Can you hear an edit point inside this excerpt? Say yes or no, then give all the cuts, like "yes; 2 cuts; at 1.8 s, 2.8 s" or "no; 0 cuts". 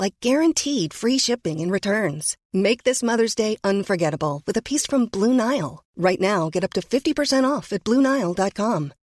no; 0 cuts